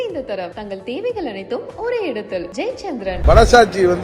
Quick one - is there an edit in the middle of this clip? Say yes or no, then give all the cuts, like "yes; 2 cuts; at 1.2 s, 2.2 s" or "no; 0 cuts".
yes; 1 cut; at 3.1 s